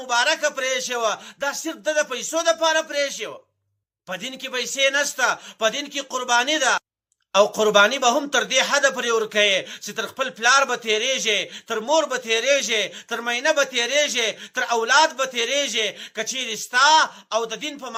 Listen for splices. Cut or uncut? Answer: uncut